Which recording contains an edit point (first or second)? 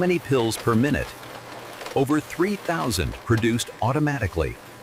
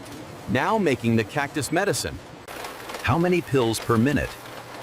second